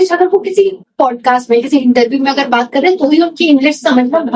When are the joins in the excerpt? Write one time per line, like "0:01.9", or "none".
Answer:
none